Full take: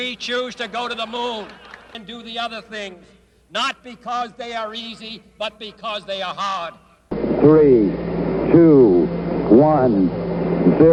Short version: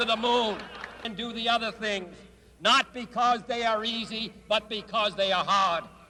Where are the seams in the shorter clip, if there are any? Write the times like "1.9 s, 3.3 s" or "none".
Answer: none

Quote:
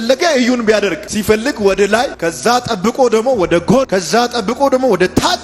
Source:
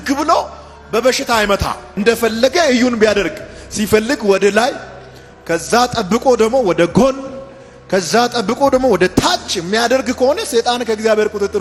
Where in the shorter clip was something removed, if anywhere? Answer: 1.1 s, 2.1 s, 3.9 s

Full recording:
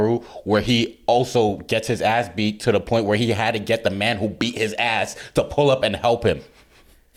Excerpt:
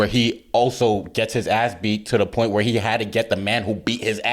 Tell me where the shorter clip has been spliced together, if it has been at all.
none

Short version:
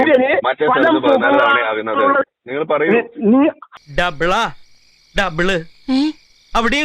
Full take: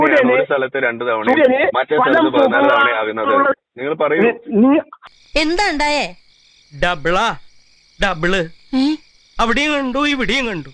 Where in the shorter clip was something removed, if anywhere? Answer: 3.7 s

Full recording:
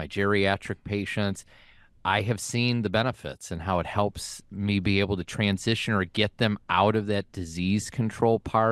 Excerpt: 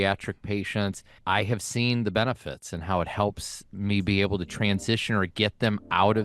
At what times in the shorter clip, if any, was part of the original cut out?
1.1 s

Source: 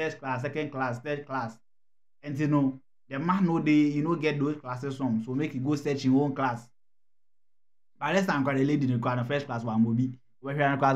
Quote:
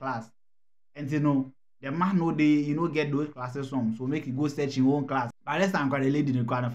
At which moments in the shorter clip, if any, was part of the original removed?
5.4 s

